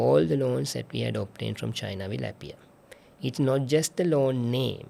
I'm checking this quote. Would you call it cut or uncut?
uncut